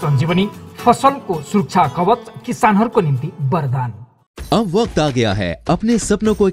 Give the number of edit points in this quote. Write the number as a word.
zero